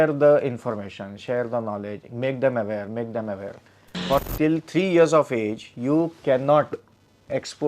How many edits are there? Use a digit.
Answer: 1